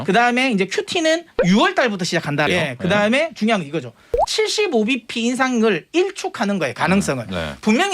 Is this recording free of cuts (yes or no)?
no